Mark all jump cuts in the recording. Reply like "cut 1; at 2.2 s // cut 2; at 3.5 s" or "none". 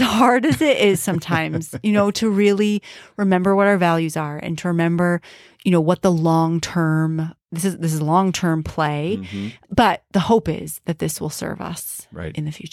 cut 1; at 9.6 s